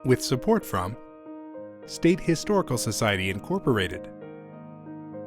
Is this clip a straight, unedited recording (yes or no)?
no